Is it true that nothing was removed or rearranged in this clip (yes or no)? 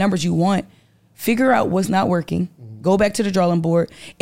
yes